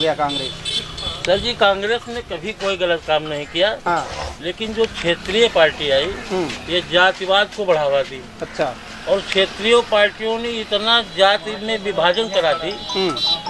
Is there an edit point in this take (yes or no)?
no